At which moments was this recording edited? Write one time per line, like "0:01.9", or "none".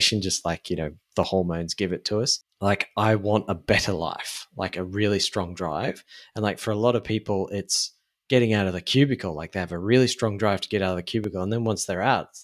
0:02.4

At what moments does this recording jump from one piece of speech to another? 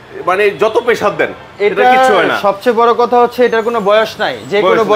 none

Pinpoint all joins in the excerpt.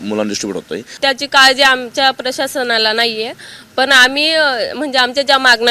0:00.9

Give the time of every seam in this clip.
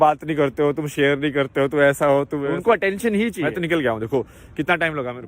0:02.5
0:03.4

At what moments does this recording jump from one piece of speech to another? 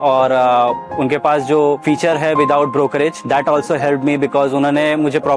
0:01.8
0:03.2

